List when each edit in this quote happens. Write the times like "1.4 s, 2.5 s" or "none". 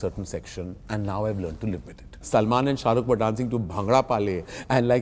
2.2 s